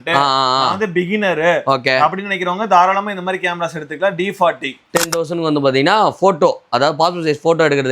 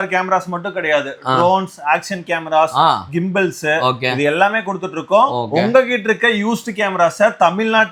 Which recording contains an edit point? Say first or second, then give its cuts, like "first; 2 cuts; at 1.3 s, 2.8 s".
first; 1 cut; at 4.9 s